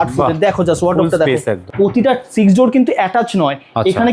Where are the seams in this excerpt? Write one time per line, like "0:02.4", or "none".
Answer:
0:01.6